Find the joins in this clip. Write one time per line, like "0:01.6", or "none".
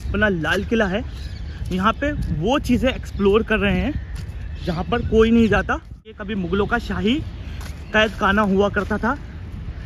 0:06.2